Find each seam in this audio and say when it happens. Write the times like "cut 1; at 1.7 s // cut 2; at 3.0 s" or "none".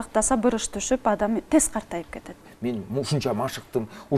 cut 1; at 2.4 s